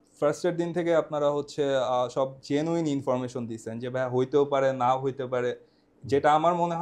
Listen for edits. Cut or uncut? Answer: uncut